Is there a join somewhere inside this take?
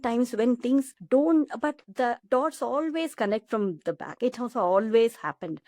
yes; 2 cuts; at 1.0 s, 2.1 s

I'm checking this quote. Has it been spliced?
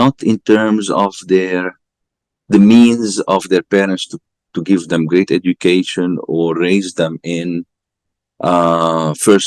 no; 0 cuts

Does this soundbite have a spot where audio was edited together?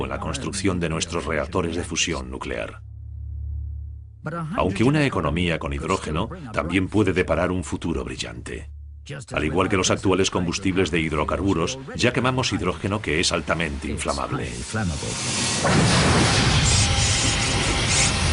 no; 0 cuts

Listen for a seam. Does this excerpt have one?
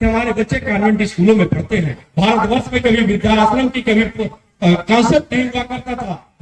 yes; 1 cut; at 2.0 s

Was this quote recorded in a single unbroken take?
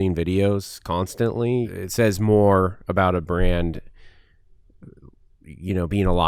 no; 1 cut; at 1.7 s

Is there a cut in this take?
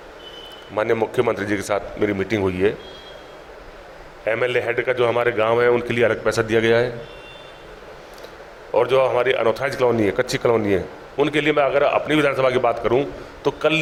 no; 0 cuts

